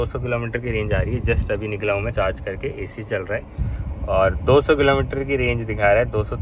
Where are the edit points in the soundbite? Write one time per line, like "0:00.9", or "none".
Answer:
none

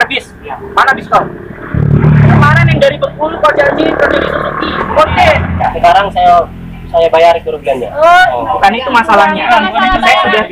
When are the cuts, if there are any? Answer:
0:01.8
0:05.6

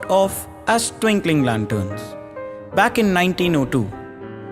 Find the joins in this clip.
0:02.7

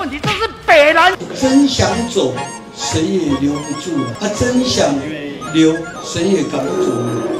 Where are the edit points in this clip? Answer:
0:01.2
0:04.1
0:06.0

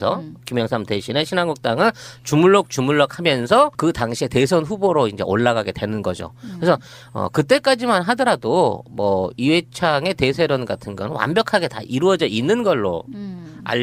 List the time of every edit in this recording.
0:02.9

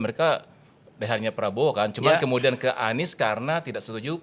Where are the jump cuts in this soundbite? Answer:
none

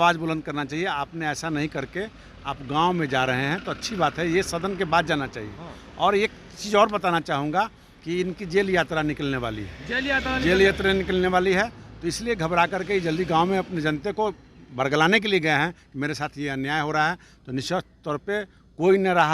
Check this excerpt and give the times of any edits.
none

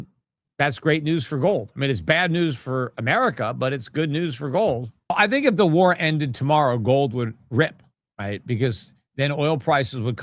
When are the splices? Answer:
0:05.1

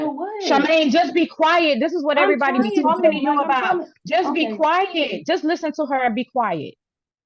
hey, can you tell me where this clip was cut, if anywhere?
none

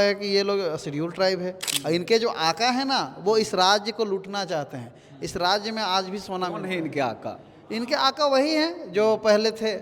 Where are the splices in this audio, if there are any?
0:01.7

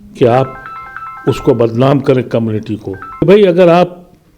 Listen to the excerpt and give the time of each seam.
0:03.2

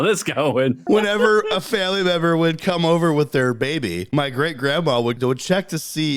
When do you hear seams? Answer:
0:00.8
0:04.0
0:05.2

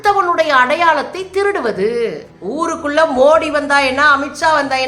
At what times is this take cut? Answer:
0:02.3

